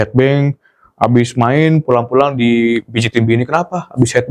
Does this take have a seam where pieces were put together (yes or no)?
no